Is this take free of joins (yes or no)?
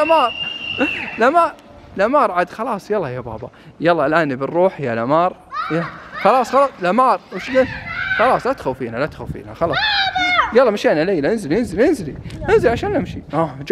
yes